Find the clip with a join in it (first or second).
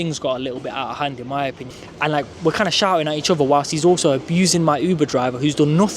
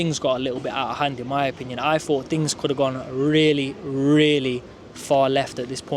first